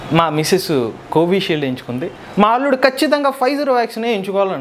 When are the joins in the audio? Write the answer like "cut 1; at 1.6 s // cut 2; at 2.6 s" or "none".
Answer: cut 1; at 2.1 s